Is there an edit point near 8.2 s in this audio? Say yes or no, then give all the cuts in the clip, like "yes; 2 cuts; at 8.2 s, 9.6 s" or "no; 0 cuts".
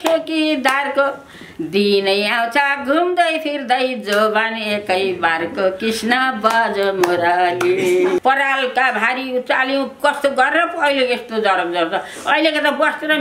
yes; 1 cut; at 8.2 s